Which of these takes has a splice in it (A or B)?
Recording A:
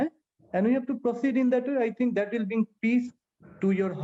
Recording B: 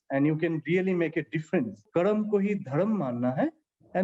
B